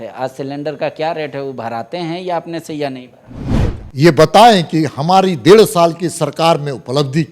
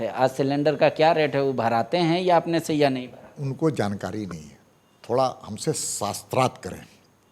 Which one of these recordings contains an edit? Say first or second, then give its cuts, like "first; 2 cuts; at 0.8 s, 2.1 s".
first; 1 cut; at 3.5 s